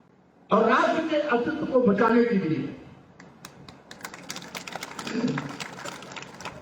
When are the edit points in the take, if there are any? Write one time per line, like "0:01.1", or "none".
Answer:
none